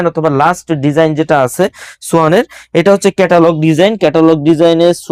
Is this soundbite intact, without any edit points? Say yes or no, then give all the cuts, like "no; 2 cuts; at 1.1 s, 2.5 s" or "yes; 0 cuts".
yes; 0 cuts